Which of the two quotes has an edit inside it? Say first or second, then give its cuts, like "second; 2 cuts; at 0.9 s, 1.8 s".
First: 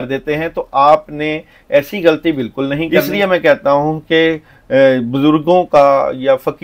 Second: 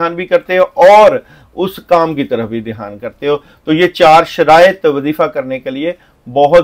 first; 1 cut; at 3.0 s